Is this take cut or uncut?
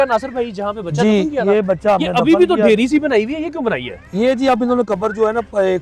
uncut